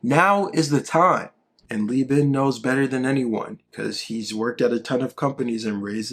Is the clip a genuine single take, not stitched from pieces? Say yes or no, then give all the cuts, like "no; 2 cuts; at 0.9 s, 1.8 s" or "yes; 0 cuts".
no; 1 cut; at 1.4 s